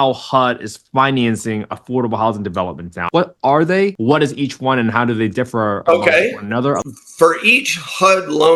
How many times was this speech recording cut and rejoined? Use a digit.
3